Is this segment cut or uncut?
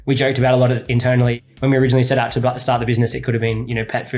cut